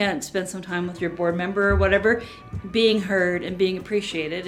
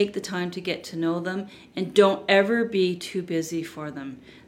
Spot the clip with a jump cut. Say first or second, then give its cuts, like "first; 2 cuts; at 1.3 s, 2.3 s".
first; 2 cuts; at 1.0 s, 2.3 s